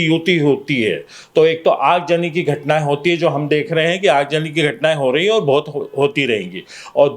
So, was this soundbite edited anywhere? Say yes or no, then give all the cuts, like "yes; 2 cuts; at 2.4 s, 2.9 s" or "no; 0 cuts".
no; 0 cuts